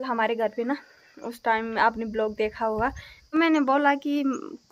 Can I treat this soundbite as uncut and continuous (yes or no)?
no